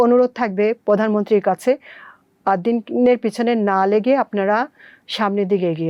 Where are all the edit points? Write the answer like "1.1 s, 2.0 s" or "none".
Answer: none